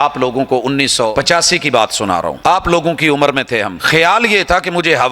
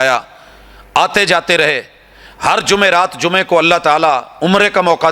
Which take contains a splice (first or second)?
first